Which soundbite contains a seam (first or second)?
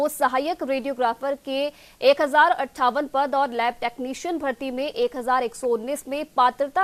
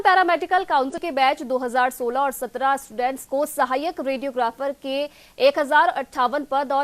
second